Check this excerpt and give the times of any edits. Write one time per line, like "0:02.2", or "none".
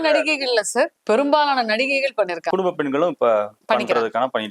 0:01.0
0:02.4
0:03.6

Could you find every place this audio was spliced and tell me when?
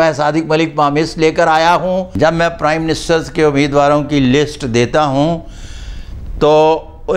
0:02.1

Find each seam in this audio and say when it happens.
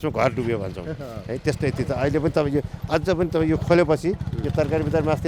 none

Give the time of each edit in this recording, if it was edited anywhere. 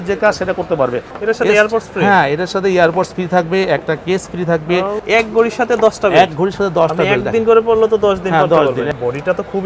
0:01.1
0:05.0
0:08.9

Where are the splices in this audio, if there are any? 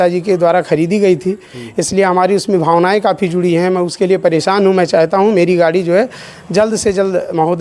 none

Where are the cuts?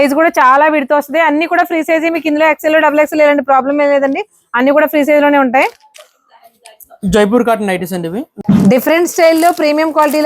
0:08.3

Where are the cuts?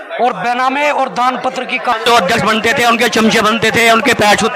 0:01.9

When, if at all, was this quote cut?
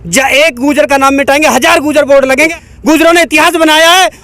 0:02.5

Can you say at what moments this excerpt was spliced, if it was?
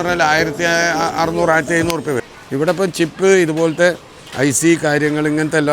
0:02.3

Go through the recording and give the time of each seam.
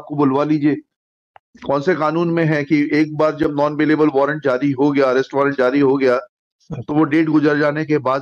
none

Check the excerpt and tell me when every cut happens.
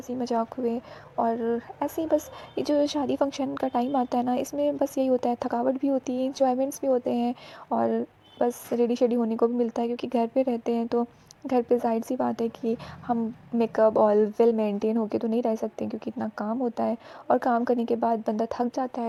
none

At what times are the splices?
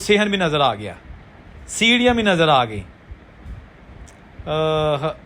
none

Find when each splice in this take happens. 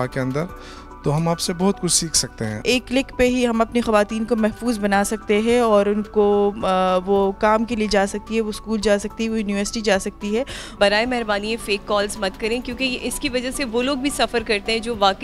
0:02.5
0:10.8

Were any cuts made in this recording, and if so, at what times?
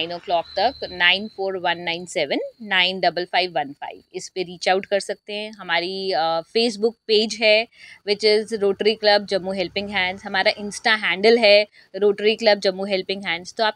none

